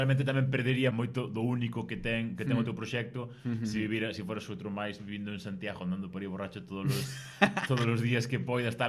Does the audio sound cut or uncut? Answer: cut